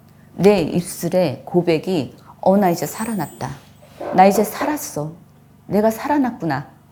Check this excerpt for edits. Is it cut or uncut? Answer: uncut